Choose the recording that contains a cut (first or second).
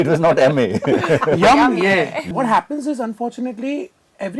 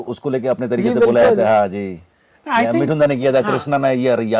first